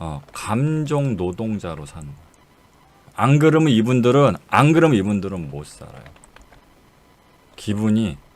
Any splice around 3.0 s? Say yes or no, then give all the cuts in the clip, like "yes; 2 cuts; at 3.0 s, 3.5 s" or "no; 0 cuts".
yes; 1 cut; at 3.0 s